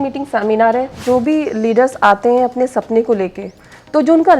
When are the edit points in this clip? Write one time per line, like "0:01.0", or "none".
0:01.0